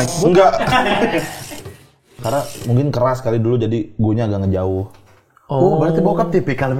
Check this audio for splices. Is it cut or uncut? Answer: cut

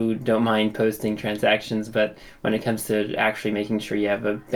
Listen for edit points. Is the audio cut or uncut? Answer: uncut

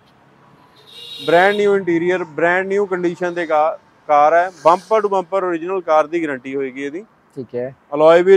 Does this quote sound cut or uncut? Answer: uncut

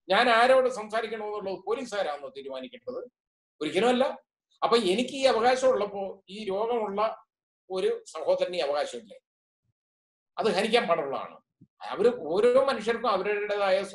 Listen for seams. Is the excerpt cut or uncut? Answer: uncut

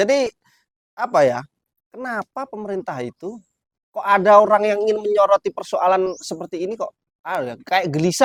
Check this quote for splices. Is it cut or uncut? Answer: uncut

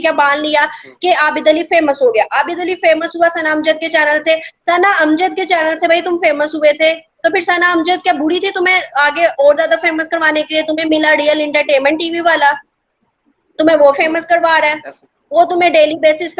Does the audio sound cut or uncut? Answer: uncut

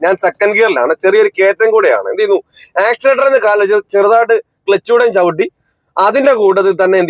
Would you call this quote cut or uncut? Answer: uncut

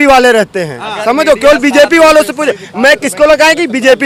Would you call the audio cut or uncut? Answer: uncut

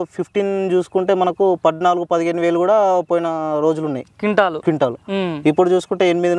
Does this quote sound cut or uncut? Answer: uncut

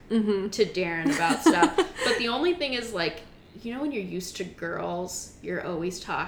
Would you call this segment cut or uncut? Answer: uncut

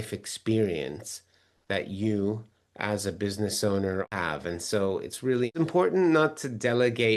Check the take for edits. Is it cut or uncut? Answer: cut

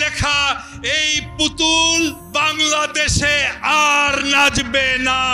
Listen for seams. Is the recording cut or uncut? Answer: cut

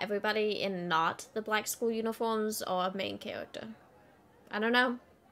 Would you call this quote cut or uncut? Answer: uncut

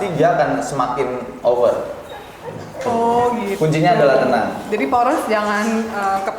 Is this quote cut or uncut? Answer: uncut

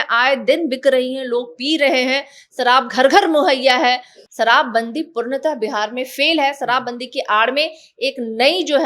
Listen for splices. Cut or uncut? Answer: cut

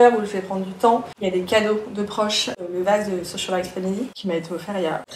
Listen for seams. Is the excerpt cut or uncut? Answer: uncut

